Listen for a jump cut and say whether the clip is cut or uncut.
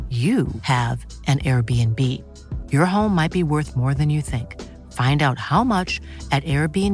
uncut